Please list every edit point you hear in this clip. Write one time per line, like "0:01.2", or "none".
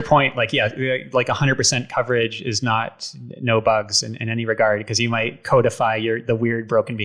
none